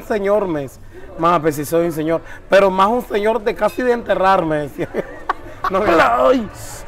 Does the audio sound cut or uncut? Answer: cut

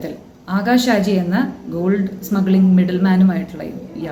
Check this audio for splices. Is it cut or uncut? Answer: uncut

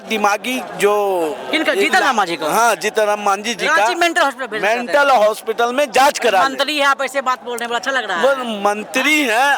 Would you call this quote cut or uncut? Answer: uncut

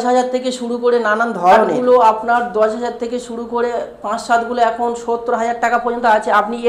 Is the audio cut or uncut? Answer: cut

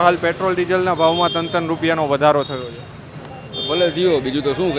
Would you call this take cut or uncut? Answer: uncut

